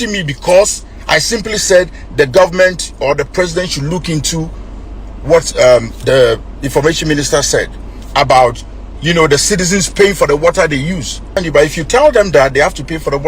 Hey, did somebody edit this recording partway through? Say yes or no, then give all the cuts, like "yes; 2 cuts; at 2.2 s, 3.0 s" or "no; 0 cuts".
yes; 1 cut; at 11.4 s